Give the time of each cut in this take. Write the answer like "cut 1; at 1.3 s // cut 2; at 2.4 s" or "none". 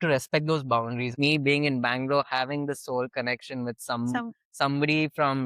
cut 1; at 1.1 s